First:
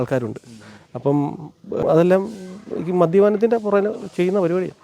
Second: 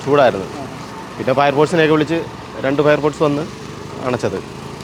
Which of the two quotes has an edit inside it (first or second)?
first